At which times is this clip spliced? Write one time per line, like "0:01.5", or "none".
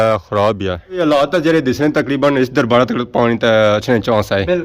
0:01.0